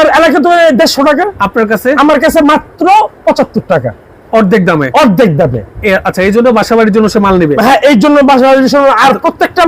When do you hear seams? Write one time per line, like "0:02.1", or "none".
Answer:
none